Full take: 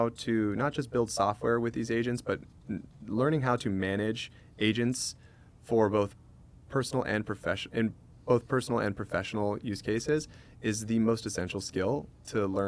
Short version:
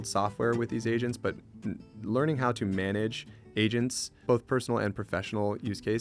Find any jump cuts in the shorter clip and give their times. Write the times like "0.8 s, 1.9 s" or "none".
4.1 s